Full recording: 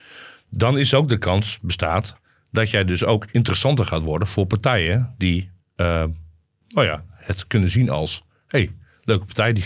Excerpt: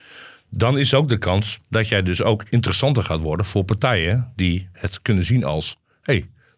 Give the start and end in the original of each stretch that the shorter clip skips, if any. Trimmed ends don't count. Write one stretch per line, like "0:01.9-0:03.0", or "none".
0:01.5-0:02.4
0:05.6-0:07.2